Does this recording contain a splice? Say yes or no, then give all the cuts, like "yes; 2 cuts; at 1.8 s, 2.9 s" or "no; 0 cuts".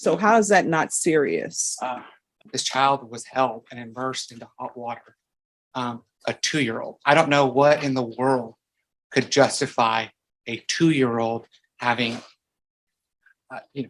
yes; 1 cut; at 2.3 s